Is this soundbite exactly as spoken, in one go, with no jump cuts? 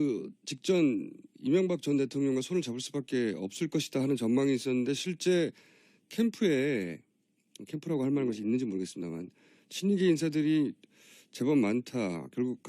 no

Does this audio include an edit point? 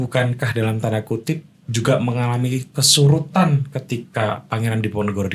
no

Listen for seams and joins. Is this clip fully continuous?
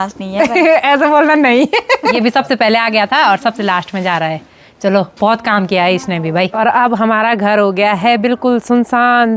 no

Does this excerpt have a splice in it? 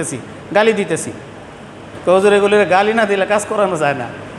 yes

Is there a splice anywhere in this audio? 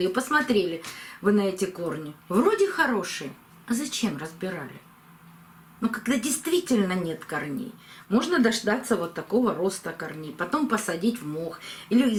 no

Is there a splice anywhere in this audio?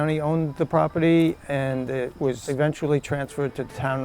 yes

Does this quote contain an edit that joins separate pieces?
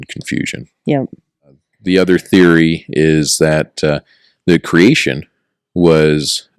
yes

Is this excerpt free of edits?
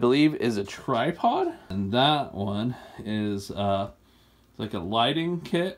no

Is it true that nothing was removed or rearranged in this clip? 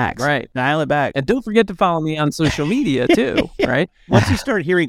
no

